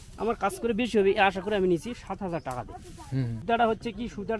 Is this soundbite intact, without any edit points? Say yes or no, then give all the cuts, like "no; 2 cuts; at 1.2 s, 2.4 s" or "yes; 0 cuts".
no; 1 cut; at 3.4 s